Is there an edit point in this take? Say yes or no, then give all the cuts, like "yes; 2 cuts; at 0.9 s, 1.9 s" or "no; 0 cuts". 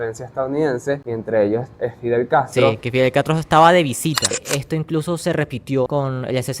yes; 4 cuts; at 1.1 s, 1.7 s, 4.4 s, 5.9 s